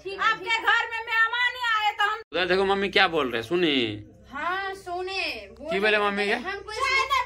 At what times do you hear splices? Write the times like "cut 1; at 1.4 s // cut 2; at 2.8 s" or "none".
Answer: cut 1; at 2.2 s